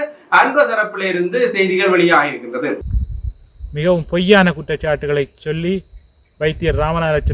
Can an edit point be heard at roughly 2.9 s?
yes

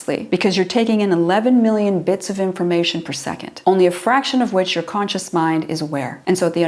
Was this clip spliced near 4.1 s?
no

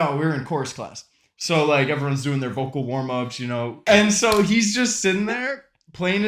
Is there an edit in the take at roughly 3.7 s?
yes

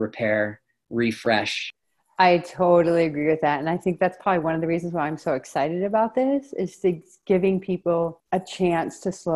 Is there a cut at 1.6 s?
yes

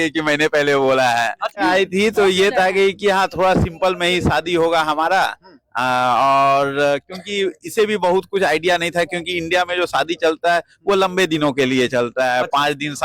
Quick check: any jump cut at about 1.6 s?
yes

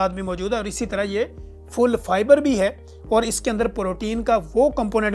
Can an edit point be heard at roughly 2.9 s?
no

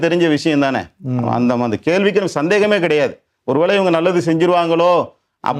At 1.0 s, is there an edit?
no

